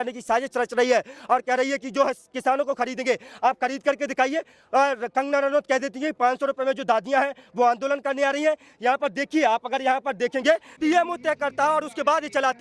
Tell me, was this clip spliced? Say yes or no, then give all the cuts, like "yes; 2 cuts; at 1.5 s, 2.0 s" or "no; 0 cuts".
yes; 1 cut; at 10.7 s